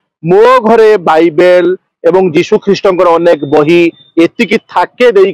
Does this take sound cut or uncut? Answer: uncut